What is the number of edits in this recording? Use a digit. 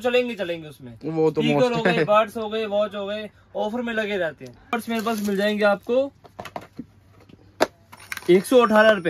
1